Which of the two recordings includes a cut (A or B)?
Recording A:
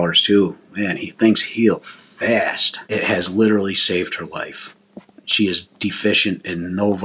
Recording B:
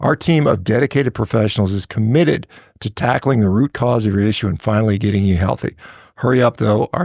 A